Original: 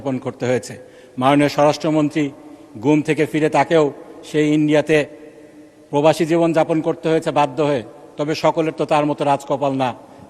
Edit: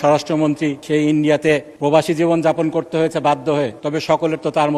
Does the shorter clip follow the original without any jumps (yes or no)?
no